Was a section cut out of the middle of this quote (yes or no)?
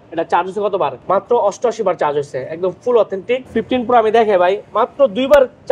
yes